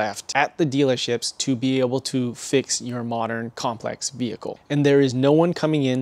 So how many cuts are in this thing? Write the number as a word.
one